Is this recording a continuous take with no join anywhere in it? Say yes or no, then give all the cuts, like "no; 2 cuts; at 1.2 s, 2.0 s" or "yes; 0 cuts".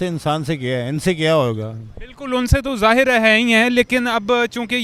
yes; 0 cuts